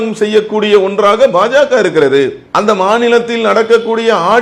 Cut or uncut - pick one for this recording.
uncut